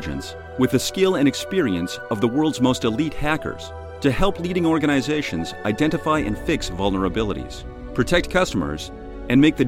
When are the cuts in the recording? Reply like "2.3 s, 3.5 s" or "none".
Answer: none